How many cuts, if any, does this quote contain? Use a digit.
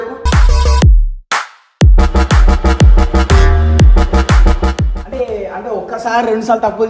1